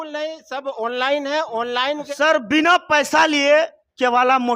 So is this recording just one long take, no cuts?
no; 1 cut; at 2.1 s

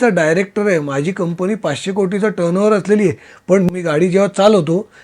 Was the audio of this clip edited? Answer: yes; 1 cut; at 3.7 s

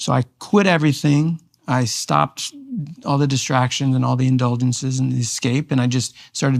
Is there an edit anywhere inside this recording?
no; 0 cuts

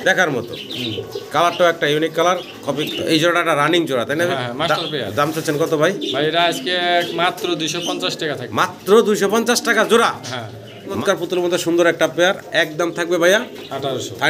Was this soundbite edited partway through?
yes; 2 cuts; at 2.8 s, 11.0 s

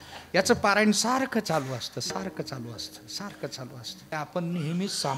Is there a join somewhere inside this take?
yes; 1 cut; at 4.1 s

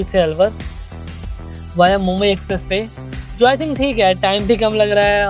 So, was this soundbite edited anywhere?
no; 0 cuts

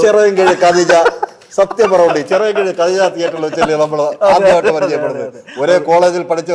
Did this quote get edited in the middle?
no; 0 cuts

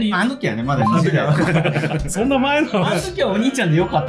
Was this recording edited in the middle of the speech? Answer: yes; 1 cut; at 2.1 s

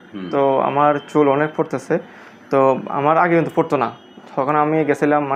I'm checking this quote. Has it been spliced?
no; 0 cuts

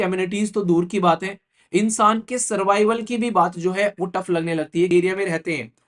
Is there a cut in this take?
yes; 1 cut; at 4.9 s

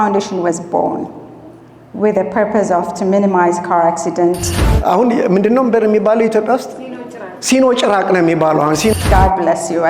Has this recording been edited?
yes; 2 cuts; at 4.7 s, 8.9 s

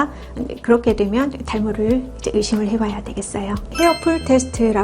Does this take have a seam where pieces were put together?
yes; 1 cut; at 3.7 s

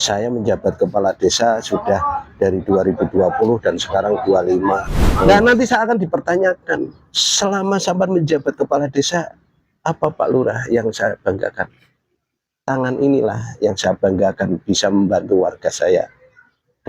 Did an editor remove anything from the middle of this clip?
yes; 1 cut; at 5.3 s

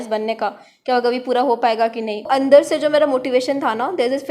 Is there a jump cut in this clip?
yes; 1 cut; at 2.3 s

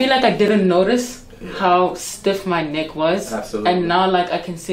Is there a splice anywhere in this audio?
no; 0 cuts

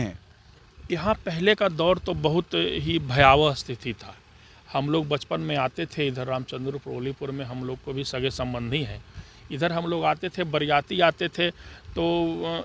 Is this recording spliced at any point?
no; 0 cuts

